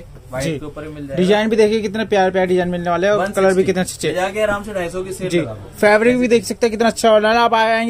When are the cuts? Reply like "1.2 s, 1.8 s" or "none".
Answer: none

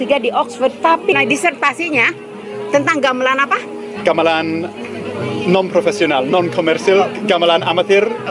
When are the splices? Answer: none

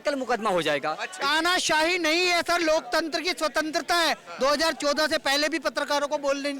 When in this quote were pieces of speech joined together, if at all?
1.2 s

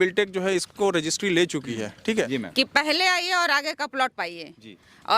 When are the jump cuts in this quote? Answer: 2.3 s

